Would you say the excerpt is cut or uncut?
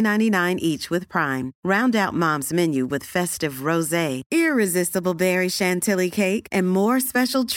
uncut